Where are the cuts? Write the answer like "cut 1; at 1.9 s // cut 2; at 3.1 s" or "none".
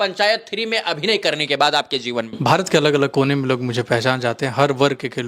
cut 1; at 2.3 s